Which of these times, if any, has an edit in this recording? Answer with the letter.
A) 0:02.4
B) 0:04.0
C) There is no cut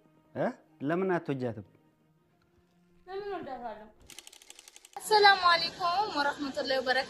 B